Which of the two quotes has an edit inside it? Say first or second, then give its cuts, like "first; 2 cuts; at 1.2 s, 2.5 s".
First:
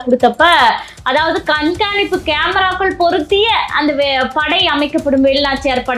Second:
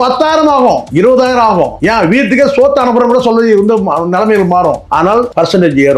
second; 3 cuts; at 0.9 s, 1.8 s, 5.0 s